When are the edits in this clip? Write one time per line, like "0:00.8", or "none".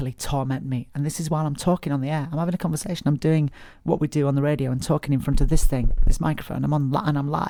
none